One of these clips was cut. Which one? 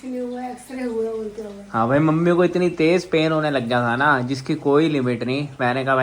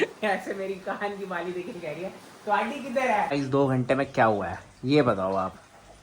second; 1 cut; at 3.3 s

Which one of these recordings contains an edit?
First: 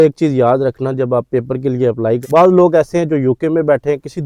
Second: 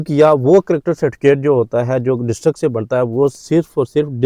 first; 1 cut; at 2.2 s

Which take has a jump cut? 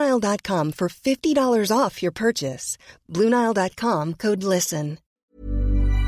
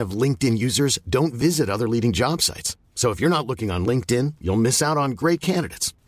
first; 1 cut; at 5.1 s

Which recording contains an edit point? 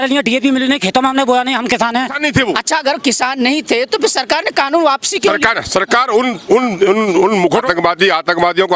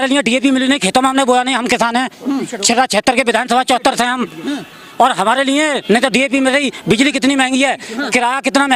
first; 2 cuts; at 2.2 s, 7.7 s

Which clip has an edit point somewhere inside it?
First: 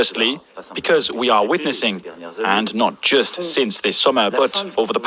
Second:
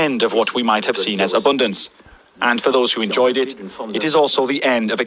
second; 1 cut; at 1.9 s

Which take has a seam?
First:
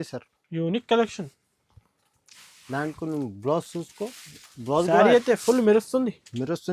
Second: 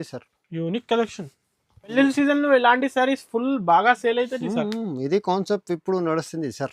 second; 1 cut; at 1.9 s

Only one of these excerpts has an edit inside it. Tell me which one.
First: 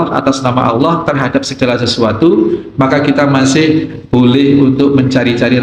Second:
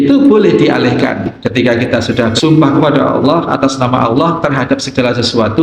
second; 2 cuts; at 1.3 s, 2.4 s

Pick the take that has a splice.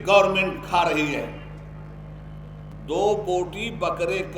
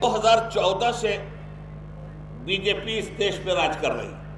first; 1 cut; at 2.7 s

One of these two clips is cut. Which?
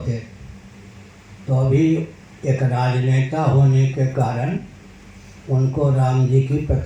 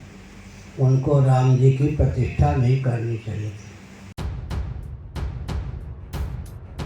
second; 1 cut; at 4.0 s

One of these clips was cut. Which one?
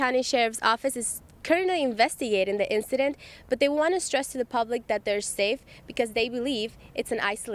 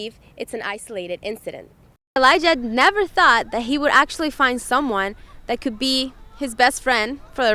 second; 1 cut; at 2.2 s

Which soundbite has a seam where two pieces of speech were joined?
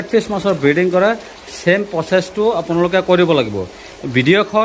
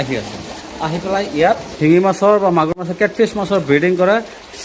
second; 1 cut; at 1.7 s

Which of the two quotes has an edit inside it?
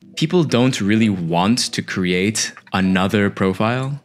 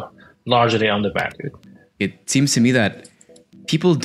second; 1 cut; at 1.9 s

